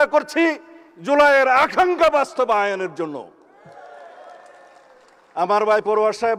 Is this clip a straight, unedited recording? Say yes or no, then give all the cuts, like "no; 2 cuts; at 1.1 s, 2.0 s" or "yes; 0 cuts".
yes; 0 cuts